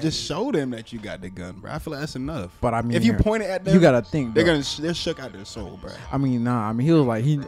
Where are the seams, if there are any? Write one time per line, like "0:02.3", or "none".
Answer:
none

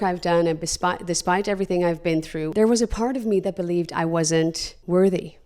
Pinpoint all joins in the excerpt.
0:02.5

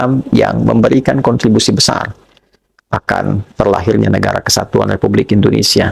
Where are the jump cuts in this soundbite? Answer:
none

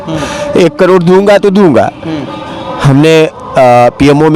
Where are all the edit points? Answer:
none

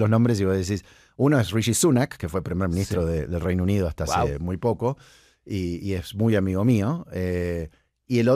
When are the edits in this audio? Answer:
none

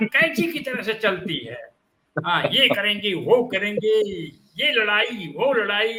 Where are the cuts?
none

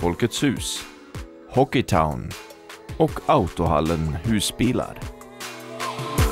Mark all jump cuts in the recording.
0:05.0

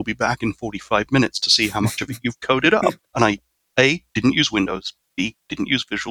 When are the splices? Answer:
0:03.0
0:05.0

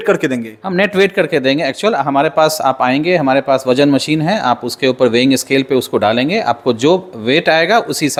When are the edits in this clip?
none

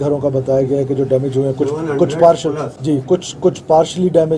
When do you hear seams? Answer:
0:02.7

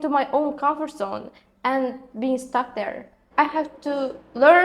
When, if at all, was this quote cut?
0:03.3

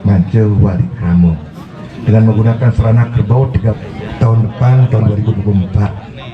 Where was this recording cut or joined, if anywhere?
0:03.8

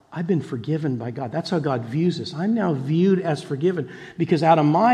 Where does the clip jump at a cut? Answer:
none

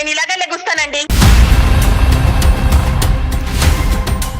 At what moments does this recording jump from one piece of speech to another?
0:01.1

